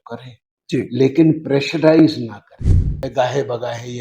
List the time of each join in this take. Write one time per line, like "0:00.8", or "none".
0:03.0